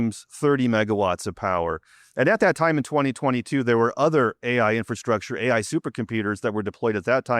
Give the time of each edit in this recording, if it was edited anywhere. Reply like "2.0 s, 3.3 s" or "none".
none

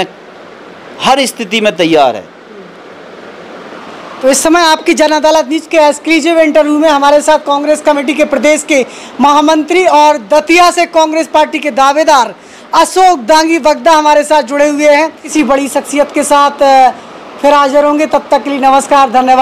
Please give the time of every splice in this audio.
none

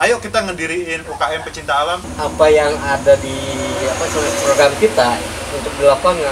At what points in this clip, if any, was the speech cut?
2.1 s

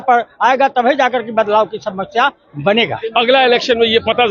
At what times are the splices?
3.0 s

